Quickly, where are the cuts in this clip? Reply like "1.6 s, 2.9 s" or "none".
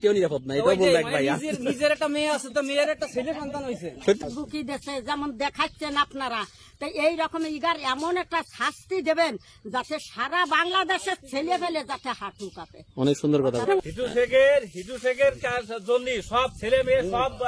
4.2 s, 13.7 s